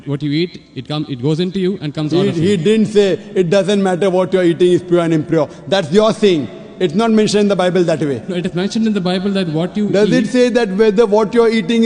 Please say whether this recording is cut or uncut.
uncut